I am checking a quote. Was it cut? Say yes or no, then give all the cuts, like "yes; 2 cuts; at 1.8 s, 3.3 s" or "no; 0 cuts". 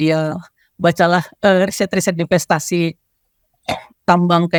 no; 0 cuts